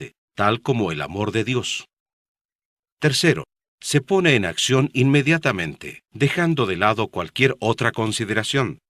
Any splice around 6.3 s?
yes; 1 cut; at 6.3 s

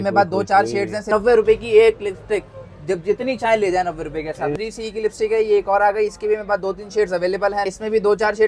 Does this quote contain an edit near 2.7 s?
no; 3 cuts; at 1.1 s, 4.6 s, 7.7 s

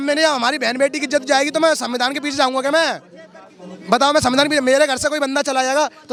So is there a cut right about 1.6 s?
no; 0 cuts

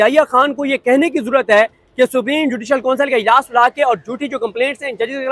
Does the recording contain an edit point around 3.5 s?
no; 0 cuts

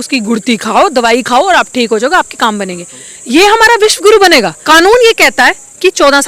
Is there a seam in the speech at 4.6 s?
yes; 1 cut; at 4.6 s

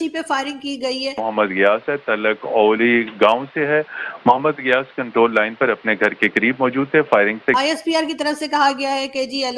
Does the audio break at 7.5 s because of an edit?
yes; 2 cuts; at 1.2 s, 7.5 s

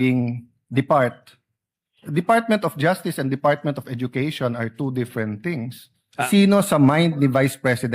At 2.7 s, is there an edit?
no; 1 cut; at 6.3 s

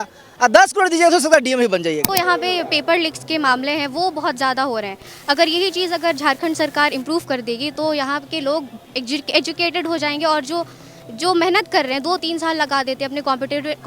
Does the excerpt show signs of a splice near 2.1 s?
yes; 1 cut; at 2.1 s

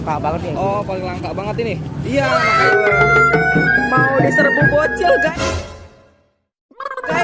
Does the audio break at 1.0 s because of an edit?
no; 1 cut; at 2.6 s

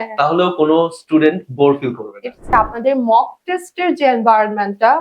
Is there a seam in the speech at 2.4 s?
yes; 1 cut; at 2.4 s

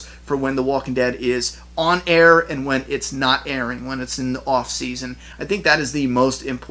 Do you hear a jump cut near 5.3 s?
no; 0 cuts

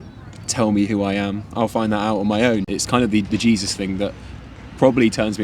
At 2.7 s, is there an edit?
yes; 1 cut; at 2.7 s

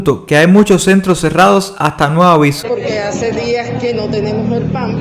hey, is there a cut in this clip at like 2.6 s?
yes; 1 cut; at 2.6 s

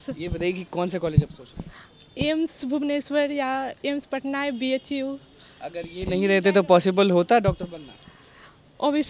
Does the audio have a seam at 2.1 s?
no; 0 cuts

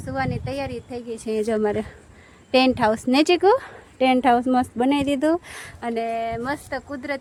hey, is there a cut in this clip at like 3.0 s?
no; 0 cuts

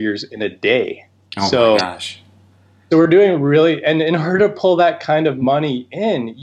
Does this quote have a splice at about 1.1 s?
no; 0 cuts

